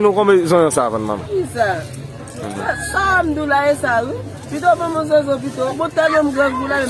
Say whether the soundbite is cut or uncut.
cut